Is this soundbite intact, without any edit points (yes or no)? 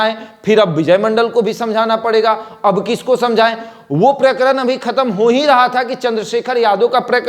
yes